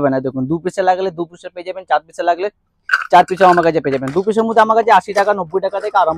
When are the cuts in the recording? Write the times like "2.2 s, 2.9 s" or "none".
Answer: none